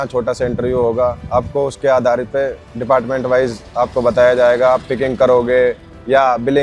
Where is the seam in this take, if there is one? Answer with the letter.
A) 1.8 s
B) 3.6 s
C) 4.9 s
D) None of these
D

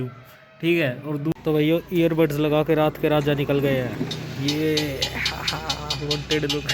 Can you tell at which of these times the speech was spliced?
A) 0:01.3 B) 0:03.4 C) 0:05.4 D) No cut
A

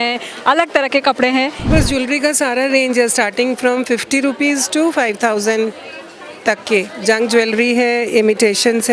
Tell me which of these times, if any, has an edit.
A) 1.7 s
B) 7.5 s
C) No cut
A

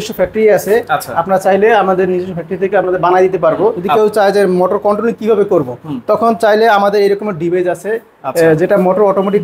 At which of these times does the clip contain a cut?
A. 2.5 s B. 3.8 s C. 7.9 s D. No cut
B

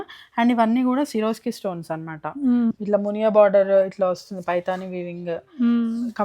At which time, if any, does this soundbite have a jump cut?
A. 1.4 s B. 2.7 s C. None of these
B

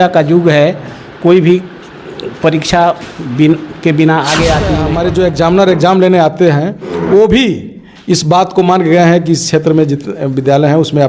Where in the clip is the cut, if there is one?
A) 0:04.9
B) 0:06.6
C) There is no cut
A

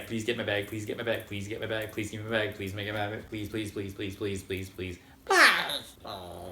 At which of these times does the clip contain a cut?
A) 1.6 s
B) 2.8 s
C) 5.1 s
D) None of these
C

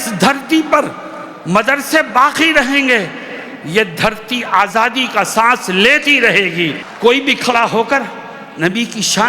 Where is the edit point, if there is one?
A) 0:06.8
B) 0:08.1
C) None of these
A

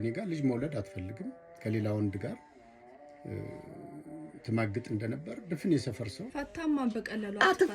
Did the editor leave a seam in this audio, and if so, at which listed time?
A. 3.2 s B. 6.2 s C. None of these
B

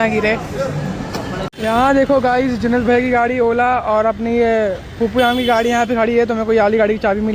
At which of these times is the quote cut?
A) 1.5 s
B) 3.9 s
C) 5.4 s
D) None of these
A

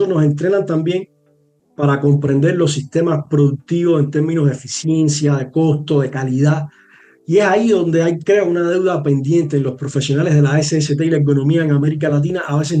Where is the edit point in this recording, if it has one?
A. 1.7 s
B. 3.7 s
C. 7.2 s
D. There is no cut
D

